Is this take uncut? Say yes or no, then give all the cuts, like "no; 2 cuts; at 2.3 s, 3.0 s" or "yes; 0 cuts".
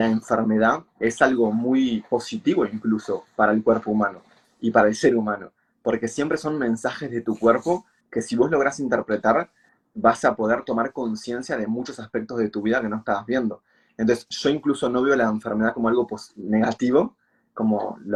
yes; 0 cuts